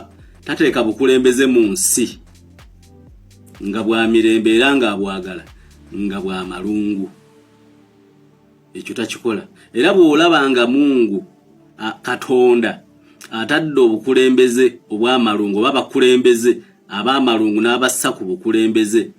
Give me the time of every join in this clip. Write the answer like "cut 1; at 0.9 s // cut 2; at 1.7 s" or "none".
cut 1; at 2.3 s // cut 2; at 3.6 s